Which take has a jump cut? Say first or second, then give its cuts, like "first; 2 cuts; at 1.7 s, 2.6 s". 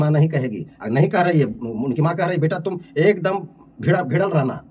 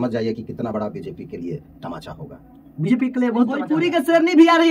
second; 1 cut; at 3.7 s